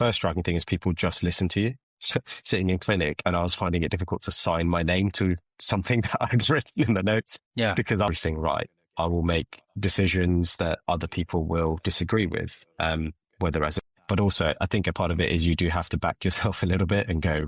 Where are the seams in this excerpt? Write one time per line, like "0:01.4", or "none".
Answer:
0:02.1
0:08.1
0:13.8

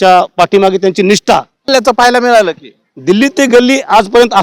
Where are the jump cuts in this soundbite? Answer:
0:01.7

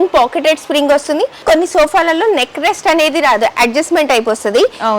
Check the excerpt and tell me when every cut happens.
0:01.4

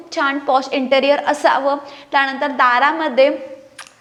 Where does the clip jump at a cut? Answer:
none

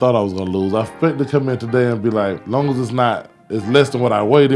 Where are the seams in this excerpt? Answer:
0:02.4

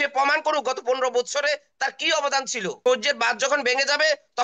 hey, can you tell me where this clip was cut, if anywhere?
0:02.8

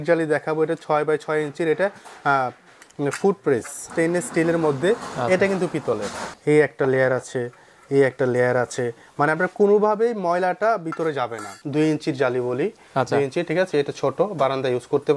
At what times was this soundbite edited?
0:03.9
0:06.3
0:11.6

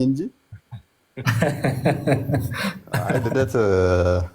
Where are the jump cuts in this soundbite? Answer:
0:03.3

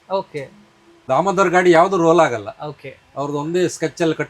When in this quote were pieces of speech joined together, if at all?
0:01.0

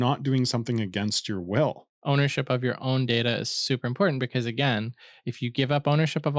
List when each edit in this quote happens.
0:01.9

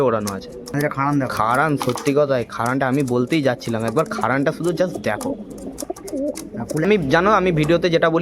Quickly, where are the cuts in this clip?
0:00.7
0:06.8

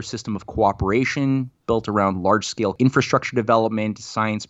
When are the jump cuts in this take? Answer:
0:02.7

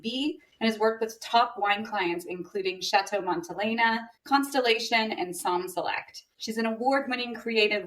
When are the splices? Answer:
none

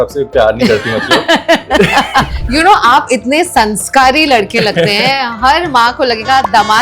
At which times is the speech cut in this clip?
0:02.3

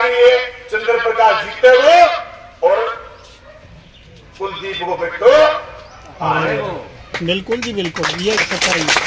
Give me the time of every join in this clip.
none

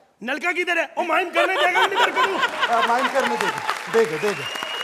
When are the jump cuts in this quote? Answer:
none

